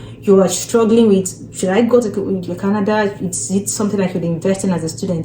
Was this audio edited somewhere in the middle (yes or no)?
no